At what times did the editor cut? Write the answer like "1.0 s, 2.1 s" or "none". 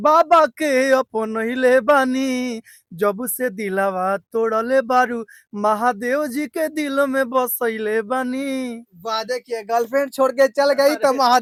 none